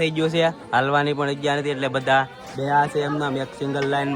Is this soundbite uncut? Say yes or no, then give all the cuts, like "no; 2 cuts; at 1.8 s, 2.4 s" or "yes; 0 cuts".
yes; 0 cuts